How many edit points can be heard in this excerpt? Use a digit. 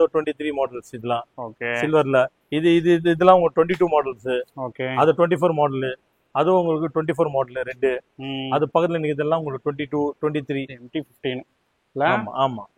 1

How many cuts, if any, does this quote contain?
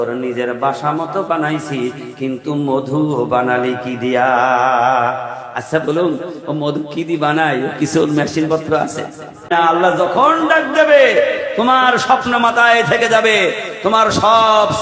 1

